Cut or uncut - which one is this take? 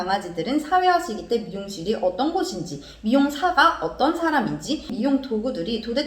cut